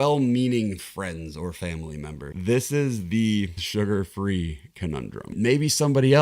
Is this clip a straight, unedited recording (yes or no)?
no